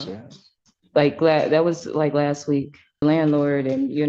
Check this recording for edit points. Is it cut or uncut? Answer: cut